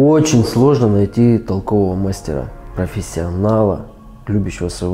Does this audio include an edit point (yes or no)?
yes